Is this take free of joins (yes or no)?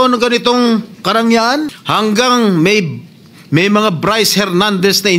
no